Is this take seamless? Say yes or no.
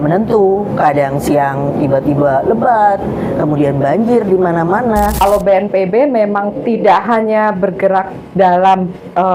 no